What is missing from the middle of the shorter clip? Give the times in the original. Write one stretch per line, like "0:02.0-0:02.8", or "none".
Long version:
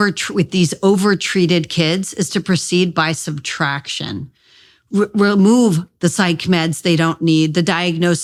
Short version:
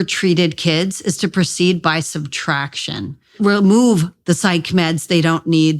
0:04.5-0:05.1

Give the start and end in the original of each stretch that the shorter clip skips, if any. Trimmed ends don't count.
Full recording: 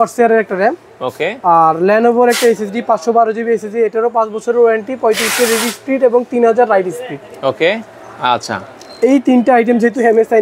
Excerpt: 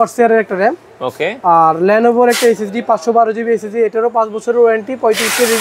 none

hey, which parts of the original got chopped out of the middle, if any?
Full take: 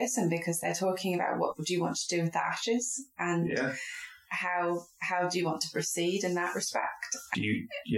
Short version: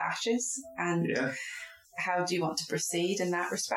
0:04.3-0:04.9

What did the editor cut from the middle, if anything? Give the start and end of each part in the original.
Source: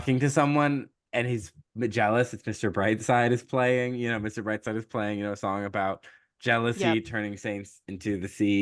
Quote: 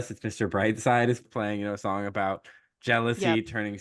0:03.5-0:04.8

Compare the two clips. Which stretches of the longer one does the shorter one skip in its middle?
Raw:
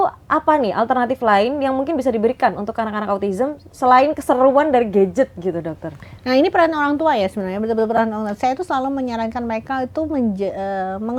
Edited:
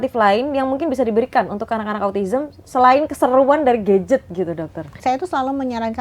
0:06.0-0:08.3

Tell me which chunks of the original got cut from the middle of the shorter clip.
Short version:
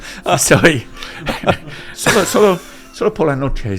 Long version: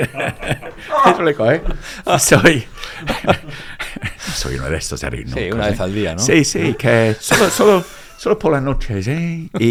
0:03.8-0:07.2

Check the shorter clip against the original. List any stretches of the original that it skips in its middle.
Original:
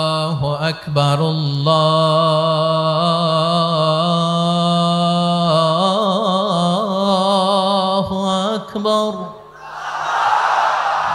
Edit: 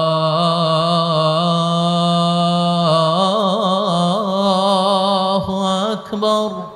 none

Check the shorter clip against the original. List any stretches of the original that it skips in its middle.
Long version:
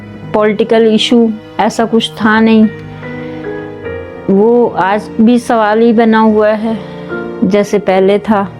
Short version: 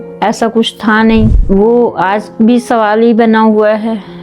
0:02.7-0:04.2

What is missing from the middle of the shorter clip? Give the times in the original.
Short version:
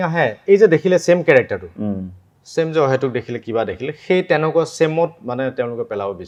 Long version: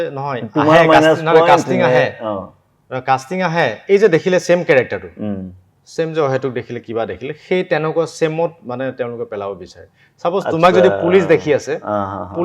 none

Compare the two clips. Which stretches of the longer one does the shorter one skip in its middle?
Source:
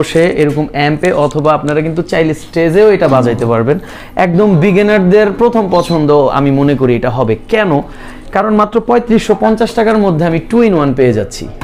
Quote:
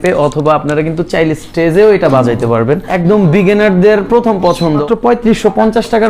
0:03.9-0:04.2
0:06.1-0:08.7

